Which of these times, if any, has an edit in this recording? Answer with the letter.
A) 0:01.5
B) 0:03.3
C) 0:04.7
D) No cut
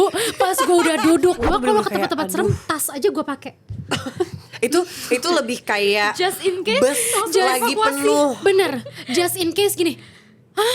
A